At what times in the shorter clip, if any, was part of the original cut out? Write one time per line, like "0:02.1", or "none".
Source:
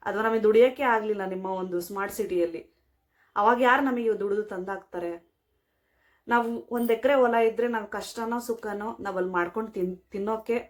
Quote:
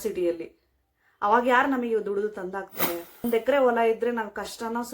0:03.2